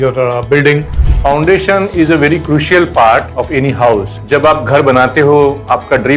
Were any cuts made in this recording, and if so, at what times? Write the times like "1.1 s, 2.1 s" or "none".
1.0 s, 3.3 s, 4.1 s